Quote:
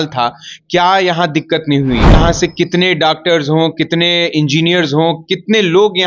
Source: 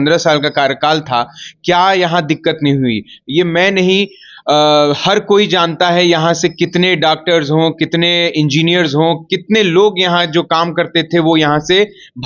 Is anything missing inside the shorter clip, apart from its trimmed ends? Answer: yes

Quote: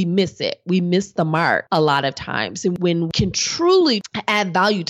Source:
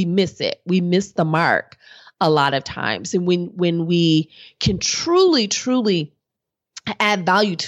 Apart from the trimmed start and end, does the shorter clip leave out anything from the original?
yes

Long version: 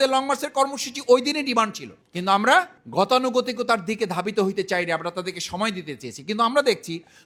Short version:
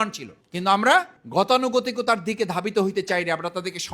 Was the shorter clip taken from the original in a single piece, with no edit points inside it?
yes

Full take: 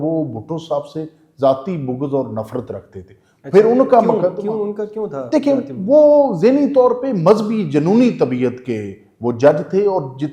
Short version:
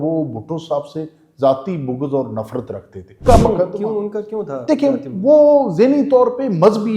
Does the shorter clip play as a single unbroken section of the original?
no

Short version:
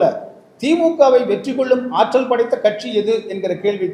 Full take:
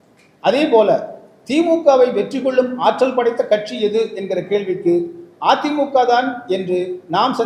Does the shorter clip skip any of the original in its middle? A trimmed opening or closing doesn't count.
no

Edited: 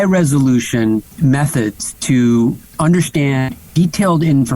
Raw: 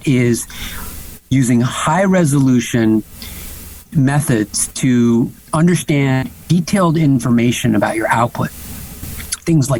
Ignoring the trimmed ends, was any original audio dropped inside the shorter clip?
yes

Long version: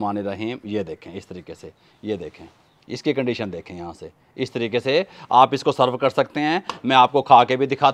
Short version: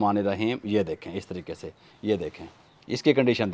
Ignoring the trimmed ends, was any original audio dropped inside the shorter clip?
no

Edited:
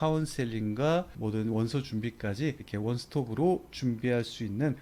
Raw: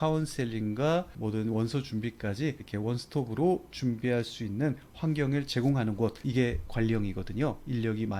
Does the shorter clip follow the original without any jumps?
yes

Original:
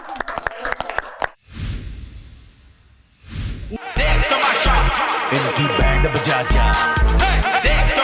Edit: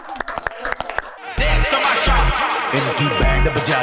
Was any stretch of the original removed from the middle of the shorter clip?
yes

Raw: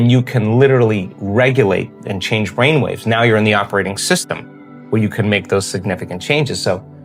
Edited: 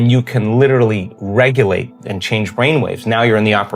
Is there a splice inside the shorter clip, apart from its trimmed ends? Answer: no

